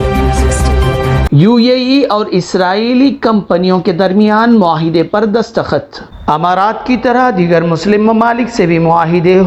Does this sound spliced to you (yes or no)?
yes